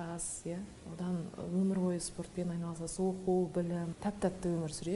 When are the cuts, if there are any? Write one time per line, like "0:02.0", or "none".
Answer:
0:03.9